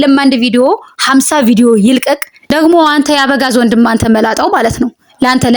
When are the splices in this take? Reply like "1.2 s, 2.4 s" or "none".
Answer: 2.3 s